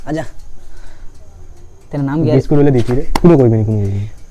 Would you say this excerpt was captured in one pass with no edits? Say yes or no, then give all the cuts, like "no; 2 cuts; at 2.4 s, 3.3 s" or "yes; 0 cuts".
yes; 0 cuts